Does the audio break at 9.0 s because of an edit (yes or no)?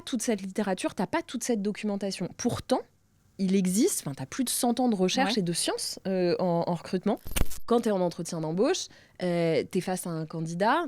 no